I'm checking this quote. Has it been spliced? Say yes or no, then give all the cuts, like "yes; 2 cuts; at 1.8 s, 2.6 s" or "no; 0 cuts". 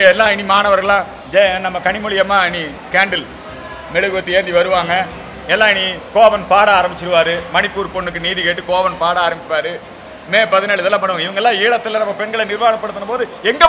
no; 0 cuts